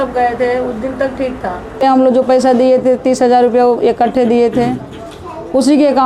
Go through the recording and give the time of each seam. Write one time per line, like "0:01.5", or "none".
0:01.8

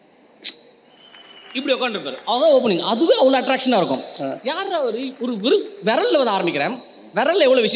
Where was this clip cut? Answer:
none

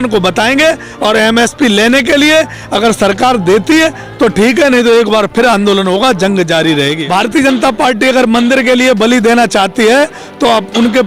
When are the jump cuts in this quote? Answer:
0:07.0

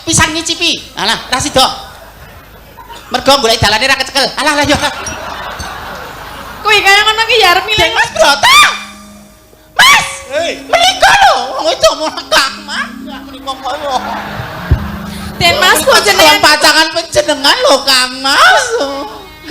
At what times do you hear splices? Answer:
0:07.9

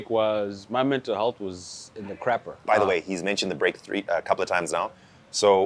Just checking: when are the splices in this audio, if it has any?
none

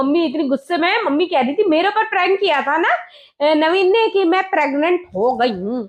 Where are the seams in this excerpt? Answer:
none

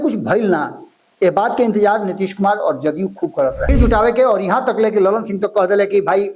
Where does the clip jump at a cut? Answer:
0:03.7

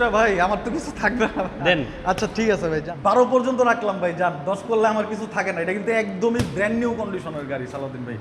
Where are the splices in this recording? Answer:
0:02.9

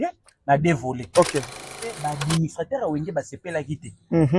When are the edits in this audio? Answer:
0:01.7

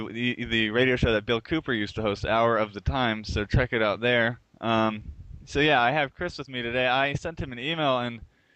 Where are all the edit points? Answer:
none

